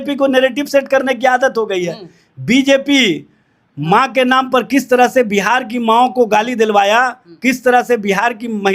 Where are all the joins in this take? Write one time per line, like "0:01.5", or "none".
none